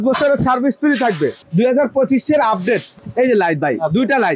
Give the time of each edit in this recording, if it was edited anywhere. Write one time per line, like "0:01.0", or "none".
0:01.4
0:03.0